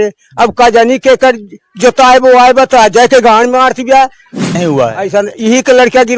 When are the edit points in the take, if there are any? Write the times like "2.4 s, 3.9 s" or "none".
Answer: 4.5 s